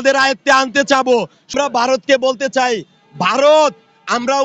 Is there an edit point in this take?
yes; 1 cut; at 1.4 s

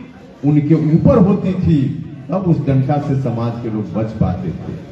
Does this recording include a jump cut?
no; 0 cuts

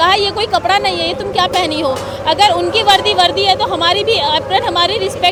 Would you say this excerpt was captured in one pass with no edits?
yes; 0 cuts

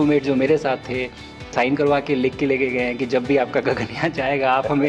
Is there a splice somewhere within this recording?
yes; 1 cut; at 1.5 s

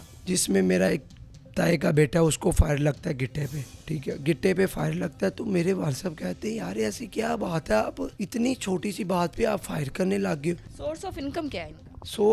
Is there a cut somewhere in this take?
yes; 3 cuts; at 3.7 s, 8.1 s, 10.7 s

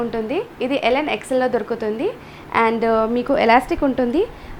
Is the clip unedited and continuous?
yes; 0 cuts

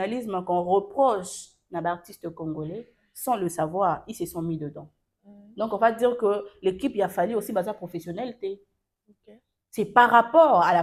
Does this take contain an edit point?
no; 0 cuts

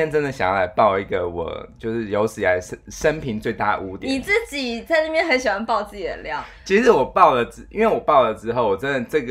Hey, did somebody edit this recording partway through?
no; 0 cuts

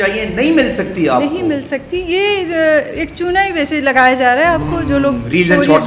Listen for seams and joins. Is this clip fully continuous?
yes; 0 cuts

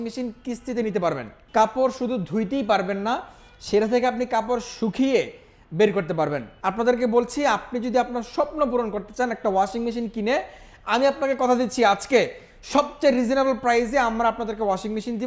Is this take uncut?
no; 2 cuts; at 1.3 s, 6.5 s

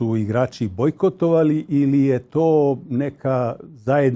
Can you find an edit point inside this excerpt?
no; 0 cuts

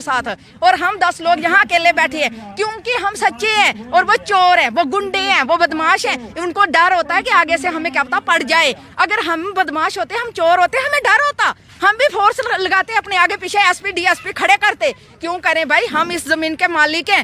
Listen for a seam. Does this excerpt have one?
no; 0 cuts

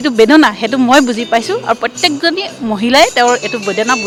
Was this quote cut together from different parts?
no; 0 cuts

